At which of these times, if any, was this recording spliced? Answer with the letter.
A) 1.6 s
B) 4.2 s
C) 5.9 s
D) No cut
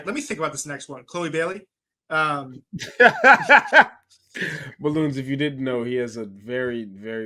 D